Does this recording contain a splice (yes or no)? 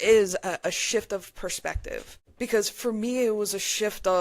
yes